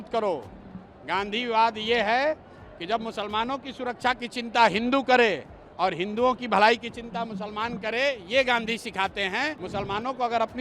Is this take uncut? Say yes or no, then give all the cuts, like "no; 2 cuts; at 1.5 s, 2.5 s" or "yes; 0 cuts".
no; 1 cut; at 9.6 s